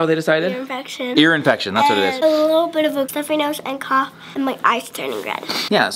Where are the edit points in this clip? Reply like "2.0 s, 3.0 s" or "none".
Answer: none

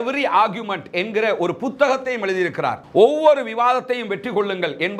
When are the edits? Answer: none

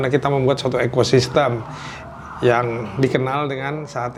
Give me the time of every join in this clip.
none

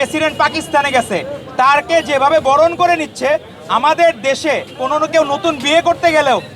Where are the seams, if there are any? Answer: none

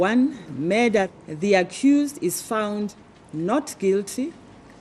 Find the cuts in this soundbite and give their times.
1.2 s

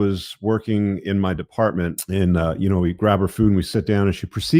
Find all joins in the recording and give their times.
2.0 s

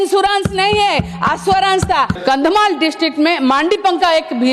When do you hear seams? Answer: 2.2 s

